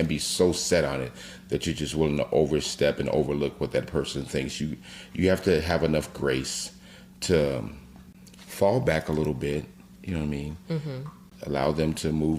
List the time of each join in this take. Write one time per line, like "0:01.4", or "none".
0:11.3

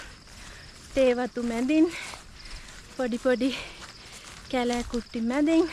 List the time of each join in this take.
none

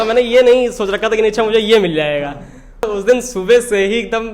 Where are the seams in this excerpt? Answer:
0:02.9

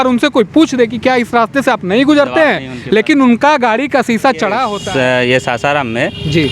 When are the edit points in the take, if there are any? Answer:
0:04.8

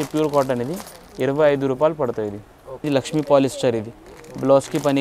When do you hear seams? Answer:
0:02.8

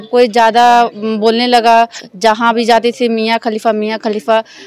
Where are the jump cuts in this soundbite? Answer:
none

